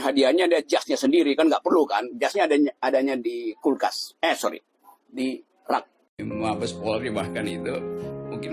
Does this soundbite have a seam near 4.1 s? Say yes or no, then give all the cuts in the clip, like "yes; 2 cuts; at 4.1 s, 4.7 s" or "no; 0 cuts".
no; 1 cut; at 6.0 s